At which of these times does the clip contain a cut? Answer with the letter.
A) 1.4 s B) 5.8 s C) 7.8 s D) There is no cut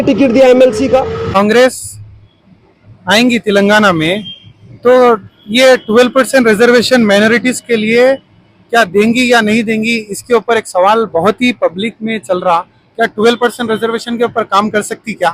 A